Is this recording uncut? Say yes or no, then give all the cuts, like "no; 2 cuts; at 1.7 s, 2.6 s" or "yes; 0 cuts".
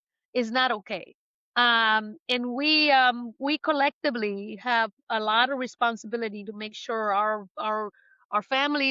yes; 0 cuts